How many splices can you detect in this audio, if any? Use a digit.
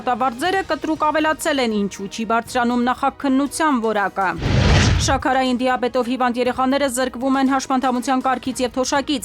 1